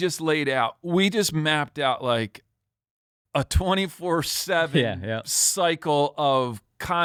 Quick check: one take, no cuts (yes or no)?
yes